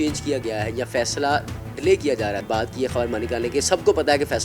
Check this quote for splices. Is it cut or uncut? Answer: cut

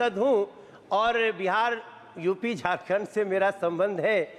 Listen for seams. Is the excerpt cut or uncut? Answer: uncut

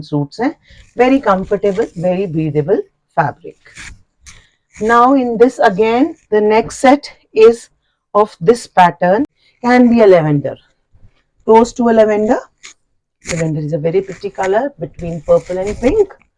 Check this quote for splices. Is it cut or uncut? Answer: cut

